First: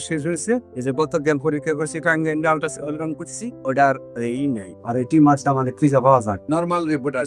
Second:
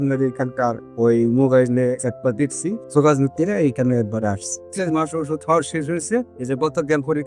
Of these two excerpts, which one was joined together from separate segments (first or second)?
second